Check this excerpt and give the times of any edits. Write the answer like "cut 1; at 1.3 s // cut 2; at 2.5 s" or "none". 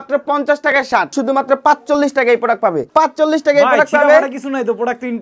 cut 1; at 1.1 s // cut 2; at 2.9 s